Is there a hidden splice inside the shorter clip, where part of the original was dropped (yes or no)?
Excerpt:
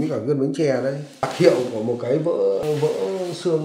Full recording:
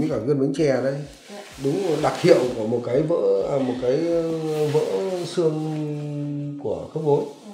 yes